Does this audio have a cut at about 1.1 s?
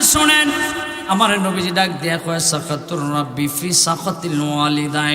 yes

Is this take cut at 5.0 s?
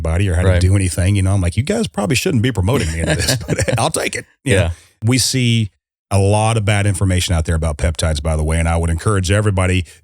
yes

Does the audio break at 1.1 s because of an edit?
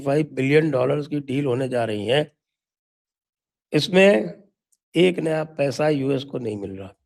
no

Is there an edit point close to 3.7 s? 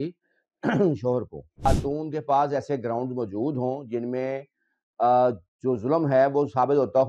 no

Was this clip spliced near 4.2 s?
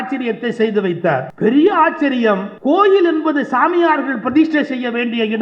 no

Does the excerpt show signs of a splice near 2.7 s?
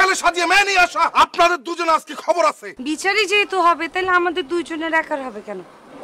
yes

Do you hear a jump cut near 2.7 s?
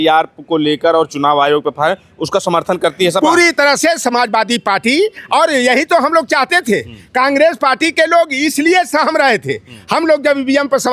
no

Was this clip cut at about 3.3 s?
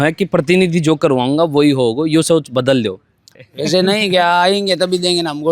yes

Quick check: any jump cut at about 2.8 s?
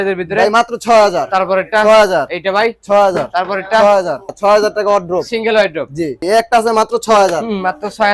no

